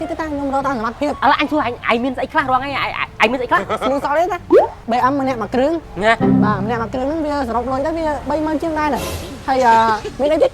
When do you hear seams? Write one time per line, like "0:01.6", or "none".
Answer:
0:01.2
0:03.8
0:04.8
0:09.2